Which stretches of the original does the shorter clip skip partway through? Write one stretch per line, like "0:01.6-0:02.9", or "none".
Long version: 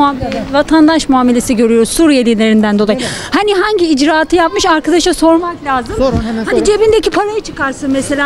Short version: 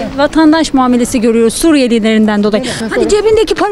0:03.1-0:06.4